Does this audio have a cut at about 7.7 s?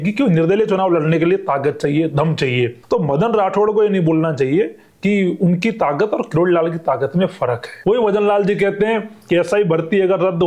yes; 2 cuts; at 2.8 s, 7.7 s

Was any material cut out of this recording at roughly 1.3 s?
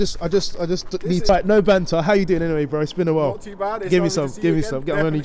yes; 1 cut; at 1.3 s

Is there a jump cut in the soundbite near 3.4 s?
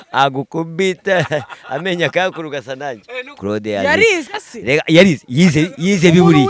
yes; 1 cut; at 3.4 s

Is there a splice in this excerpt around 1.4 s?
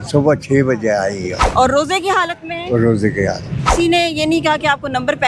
yes; 2 cuts; at 1.4 s, 3.7 s

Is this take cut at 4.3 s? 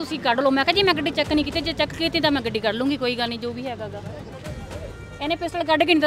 no; 0 cuts

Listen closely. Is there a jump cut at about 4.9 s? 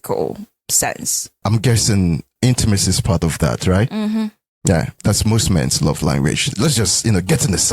yes; 3 cuts; at 2.3 s, 4.9 s, 6.5 s

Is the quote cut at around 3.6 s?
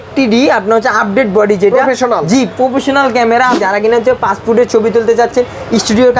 yes; 1 cut; at 3.6 s

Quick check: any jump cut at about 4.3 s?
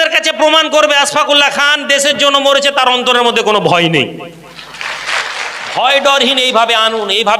no; 1 cut; at 5.5 s

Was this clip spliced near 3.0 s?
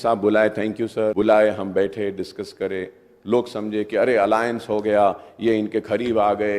no; 1 cut; at 1.1 s

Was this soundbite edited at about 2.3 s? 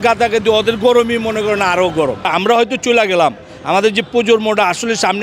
yes; 1 cut; at 2.3 s

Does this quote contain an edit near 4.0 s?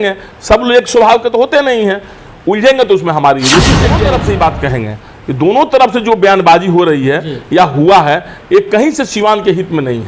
yes; 1 cut; at 4.0 s

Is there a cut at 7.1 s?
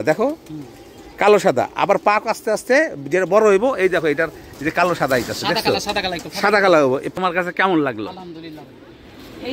yes; 1 cut; at 7.1 s

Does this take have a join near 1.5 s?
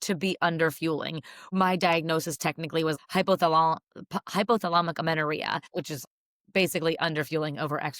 yes; 3 cuts; at 1.5 s, 2.9 s, 5.9 s

